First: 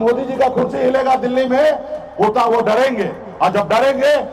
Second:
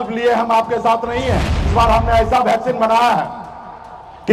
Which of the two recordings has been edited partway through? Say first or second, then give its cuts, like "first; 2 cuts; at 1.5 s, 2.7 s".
second; 1 cut; at 1.7 s